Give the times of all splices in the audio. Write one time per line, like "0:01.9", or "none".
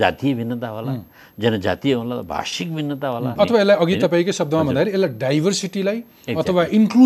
0:03.3

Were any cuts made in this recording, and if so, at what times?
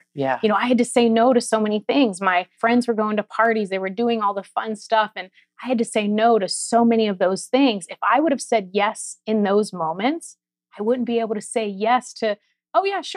0:02.5

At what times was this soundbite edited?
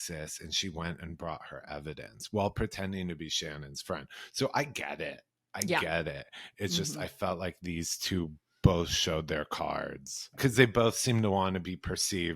0:10.4

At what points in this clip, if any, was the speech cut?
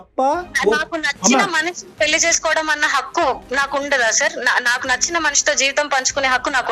none

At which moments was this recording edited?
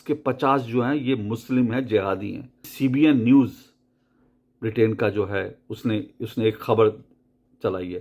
0:02.7

